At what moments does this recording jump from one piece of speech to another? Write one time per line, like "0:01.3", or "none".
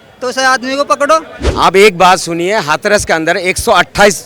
0:01.4